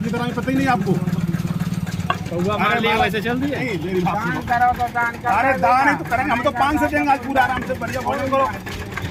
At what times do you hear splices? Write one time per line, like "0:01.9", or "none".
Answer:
none